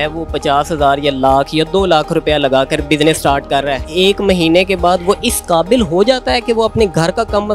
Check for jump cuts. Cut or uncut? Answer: cut